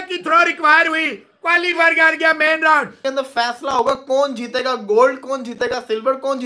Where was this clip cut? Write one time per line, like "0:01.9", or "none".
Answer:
0:02.9